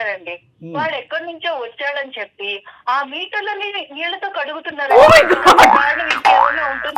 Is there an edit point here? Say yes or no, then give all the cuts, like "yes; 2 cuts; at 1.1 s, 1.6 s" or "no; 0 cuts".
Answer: no; 0 cuts